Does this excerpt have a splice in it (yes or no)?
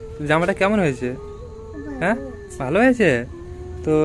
no